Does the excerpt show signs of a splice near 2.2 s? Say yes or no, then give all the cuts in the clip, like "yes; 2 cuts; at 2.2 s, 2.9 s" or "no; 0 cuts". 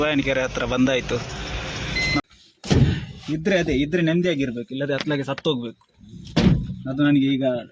yes; 1 cut; at 2.2 s